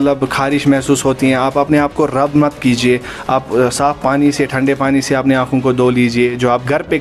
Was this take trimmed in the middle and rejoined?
no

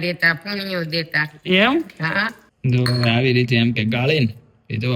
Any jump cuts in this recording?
yes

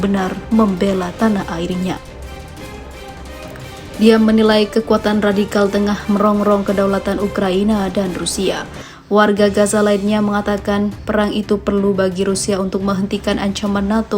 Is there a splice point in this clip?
yes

